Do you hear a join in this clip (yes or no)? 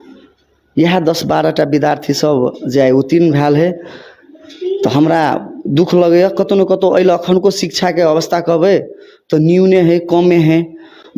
no